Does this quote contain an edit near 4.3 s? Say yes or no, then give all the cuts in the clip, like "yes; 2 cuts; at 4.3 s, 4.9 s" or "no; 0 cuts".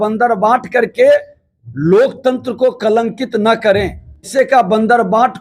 yes; 1 cut; at 4.3 s